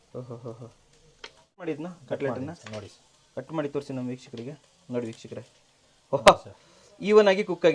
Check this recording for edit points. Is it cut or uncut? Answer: cut